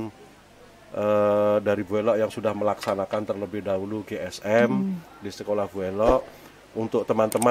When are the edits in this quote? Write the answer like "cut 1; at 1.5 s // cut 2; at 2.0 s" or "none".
none